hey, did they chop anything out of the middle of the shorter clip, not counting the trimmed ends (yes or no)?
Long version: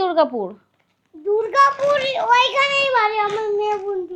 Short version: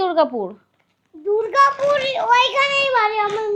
no